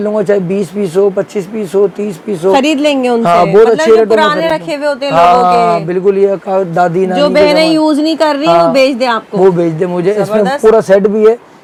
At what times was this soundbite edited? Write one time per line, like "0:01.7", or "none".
none